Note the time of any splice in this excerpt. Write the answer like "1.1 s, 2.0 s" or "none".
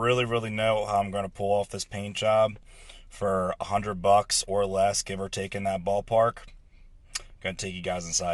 none